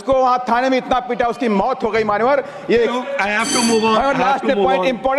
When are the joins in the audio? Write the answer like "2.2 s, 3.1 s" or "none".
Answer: 2.9 s